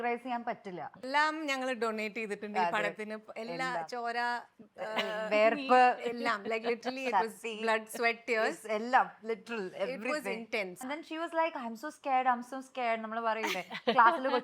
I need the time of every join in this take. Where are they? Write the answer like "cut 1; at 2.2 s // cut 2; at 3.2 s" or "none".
cut 1; at 1.0 s // cut 2; at 10.9 s